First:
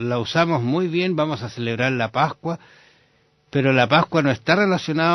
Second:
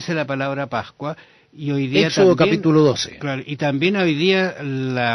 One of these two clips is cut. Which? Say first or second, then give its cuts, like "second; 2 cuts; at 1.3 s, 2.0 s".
second; 1 cut; at 1.4 s